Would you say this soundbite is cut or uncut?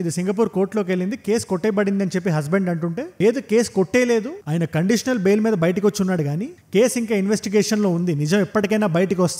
uncut